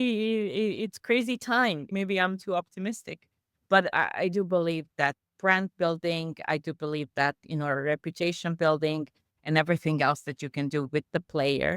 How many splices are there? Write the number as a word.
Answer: one